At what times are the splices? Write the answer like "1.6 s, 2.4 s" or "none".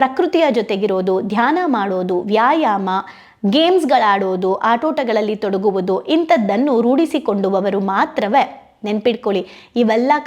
none